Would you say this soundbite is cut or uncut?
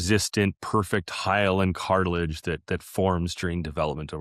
uncut